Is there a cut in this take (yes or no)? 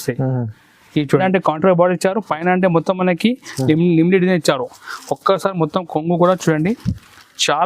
yes